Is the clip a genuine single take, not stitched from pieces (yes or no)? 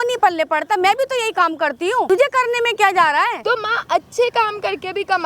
no